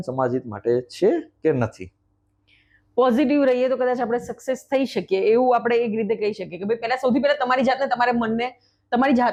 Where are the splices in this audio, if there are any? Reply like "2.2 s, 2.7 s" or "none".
none